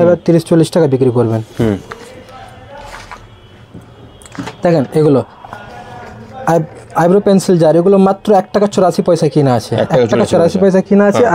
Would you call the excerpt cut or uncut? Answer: uncut